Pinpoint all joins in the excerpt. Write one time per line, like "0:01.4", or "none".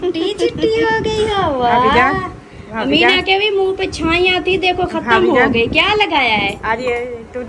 none